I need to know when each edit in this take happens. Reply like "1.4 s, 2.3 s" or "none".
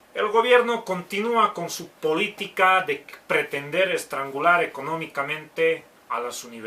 3.1 s